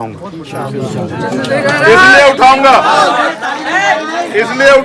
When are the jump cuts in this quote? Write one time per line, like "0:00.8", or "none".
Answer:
none